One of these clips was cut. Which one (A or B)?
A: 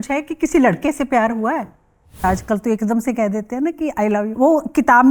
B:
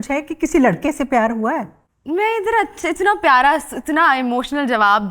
A